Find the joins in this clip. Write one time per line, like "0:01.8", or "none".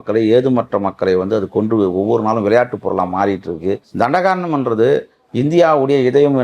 0:03.8